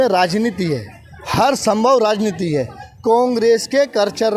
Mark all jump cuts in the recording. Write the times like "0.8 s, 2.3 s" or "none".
none